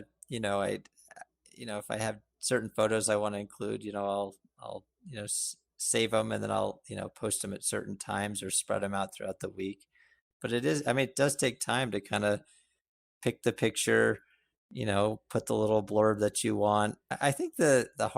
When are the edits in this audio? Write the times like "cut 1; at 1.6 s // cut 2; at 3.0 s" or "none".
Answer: cut 1; at 17.0 s